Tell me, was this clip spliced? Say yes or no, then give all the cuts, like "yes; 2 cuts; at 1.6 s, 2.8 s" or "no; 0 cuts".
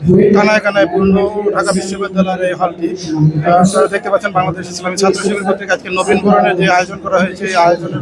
no; 0 cuts